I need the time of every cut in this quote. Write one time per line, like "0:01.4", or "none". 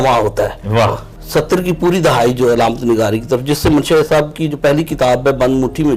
0:01.1